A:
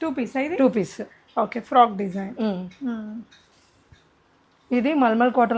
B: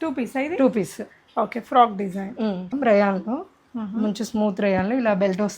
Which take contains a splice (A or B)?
B